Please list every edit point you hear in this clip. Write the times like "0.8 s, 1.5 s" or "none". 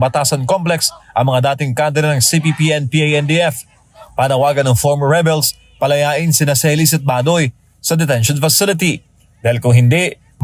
none